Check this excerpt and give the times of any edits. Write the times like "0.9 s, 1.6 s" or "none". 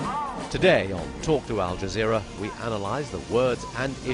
1.8 s